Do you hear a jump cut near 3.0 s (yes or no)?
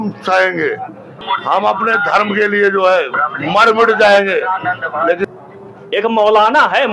no